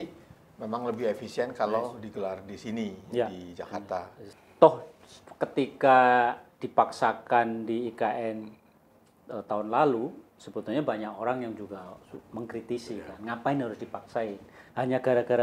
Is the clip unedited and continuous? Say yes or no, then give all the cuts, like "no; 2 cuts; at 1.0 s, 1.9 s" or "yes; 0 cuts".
no; 1 cut; at 4.2 s